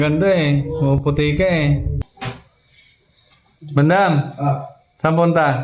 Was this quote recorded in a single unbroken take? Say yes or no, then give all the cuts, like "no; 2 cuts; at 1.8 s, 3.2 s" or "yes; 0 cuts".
no; 1 cut; at 2.1 s